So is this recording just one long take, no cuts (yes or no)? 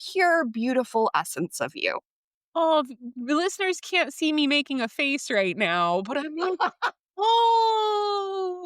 yes